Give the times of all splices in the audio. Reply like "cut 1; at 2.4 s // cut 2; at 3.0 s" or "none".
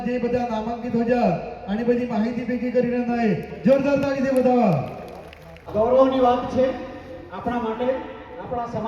cut 1; at 5.7 s